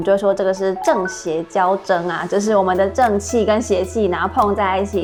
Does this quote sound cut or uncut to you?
uncut